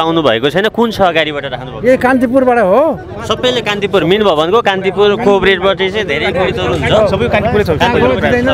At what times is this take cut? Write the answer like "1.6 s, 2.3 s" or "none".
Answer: none